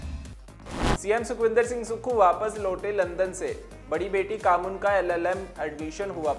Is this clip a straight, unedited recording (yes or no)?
no